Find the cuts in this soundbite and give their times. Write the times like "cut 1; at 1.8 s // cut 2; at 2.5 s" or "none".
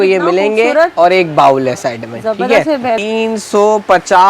cut 1; at 3.0 s